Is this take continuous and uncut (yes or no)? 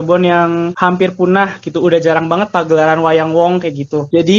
yes